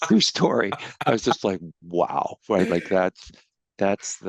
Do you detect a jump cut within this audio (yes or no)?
no